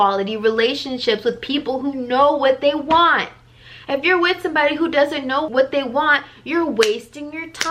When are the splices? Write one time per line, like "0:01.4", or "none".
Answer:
0:05.5